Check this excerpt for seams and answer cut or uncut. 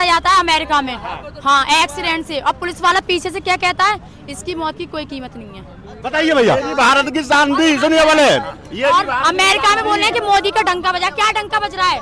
uncut